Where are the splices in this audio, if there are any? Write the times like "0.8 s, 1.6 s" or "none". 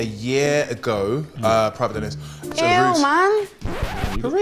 2.4 s